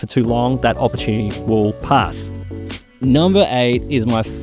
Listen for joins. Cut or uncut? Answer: uncut